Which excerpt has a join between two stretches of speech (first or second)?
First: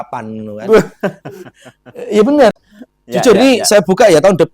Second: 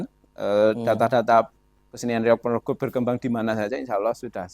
first